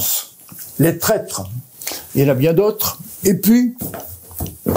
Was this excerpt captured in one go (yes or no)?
yes